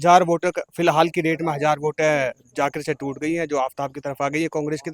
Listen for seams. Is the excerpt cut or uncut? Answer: uncut